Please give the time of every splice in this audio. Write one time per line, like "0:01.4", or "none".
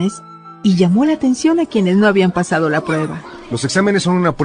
none